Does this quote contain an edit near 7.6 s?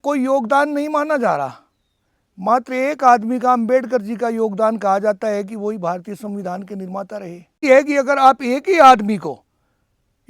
yes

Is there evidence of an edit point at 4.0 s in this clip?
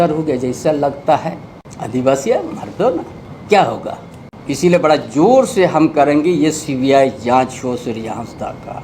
no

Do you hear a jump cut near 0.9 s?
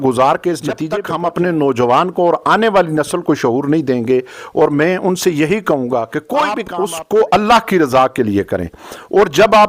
yes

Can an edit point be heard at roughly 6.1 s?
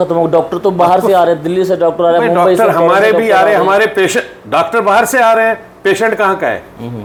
no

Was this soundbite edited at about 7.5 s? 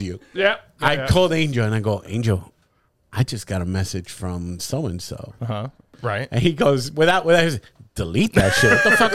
no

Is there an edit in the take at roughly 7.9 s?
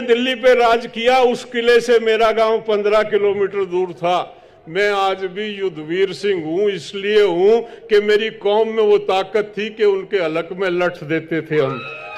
no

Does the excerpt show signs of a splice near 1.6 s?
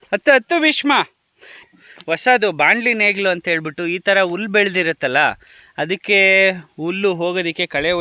yes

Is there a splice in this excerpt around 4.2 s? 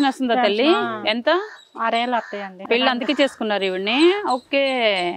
no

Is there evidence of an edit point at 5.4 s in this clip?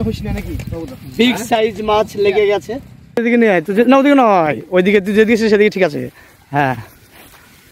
no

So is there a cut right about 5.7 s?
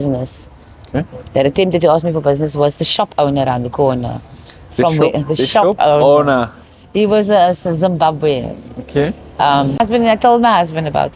no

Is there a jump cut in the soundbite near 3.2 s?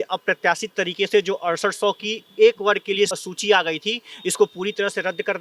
yes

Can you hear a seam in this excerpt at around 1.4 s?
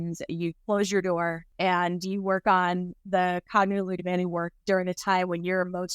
yes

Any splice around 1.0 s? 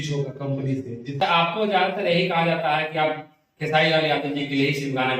yes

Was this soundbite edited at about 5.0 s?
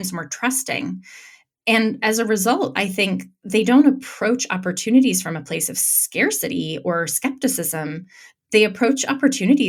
no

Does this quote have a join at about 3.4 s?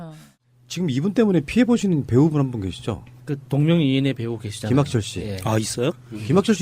yes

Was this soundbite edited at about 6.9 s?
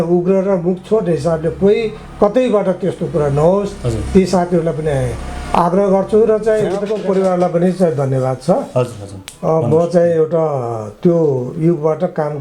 yes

